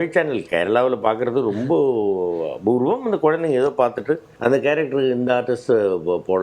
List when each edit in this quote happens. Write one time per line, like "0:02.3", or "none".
0:04.3